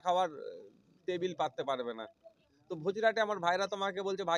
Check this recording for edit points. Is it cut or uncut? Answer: uncut